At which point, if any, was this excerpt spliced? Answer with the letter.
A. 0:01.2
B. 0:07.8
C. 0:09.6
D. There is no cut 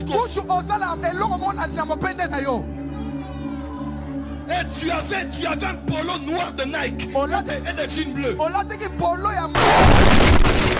C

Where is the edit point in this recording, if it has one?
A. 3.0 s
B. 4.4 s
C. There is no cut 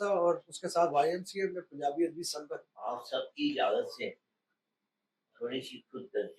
A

